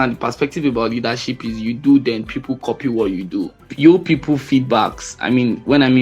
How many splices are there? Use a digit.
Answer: 1